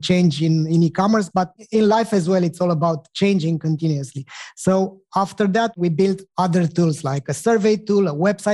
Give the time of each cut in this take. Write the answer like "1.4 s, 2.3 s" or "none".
1.6 s, 5.7 s, 7.4 s